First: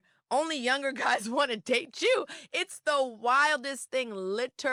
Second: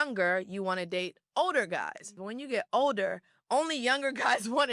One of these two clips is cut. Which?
second; 1 cut; at 2.3 s

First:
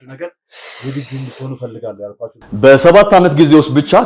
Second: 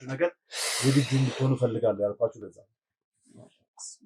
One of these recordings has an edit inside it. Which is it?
first; 1 cut; at 2.4 s

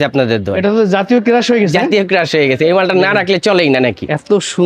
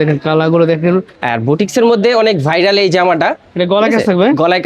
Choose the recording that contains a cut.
second; 2 cuts; at 1.2 s, 3.5 s

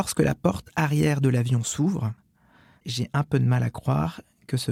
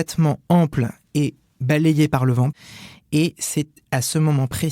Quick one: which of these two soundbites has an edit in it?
second; 2 cuts; at 2.5 s, 3.8 s

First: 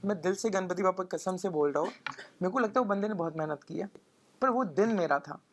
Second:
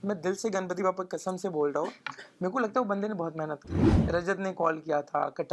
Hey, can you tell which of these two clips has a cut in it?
second; 1 cut; at 3.9 s

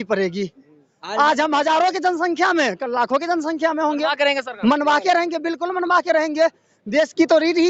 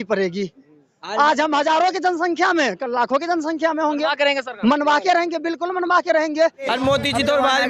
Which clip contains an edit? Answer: second; 1 cut; at 6.7 s

